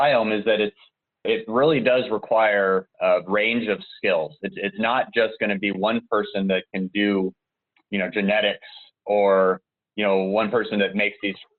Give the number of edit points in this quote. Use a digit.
2